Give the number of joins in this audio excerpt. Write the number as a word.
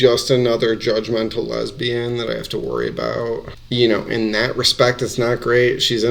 zero